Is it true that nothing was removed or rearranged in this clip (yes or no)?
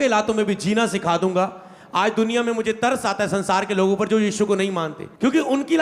yes